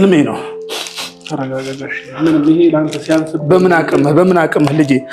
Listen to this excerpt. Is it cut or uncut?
uncut